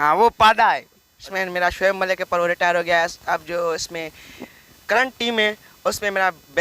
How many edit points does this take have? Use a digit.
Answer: 1